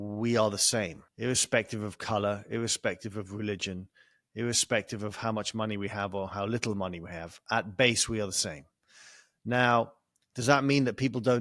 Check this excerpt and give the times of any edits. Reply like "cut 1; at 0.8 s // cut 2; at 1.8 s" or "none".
cut 1; at 1.0 s